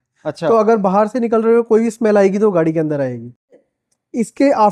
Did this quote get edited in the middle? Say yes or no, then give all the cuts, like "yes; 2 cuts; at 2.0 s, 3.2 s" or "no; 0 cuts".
yes; 1 cut; at 3.7 s